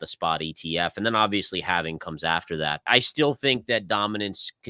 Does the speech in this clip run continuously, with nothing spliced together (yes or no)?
no